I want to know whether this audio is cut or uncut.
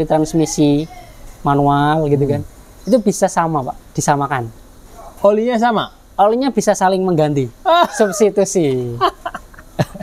uncut